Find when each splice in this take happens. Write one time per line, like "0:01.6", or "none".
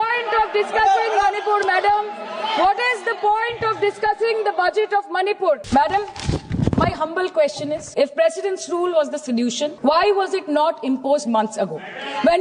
0:05.6
0:07.8
0:09.8